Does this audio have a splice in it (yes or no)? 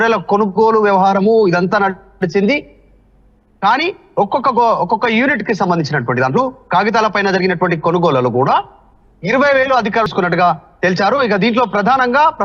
yes